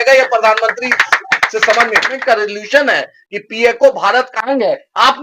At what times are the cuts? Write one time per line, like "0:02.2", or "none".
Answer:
0:02.2